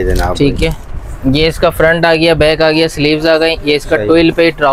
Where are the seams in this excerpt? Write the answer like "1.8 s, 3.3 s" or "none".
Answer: none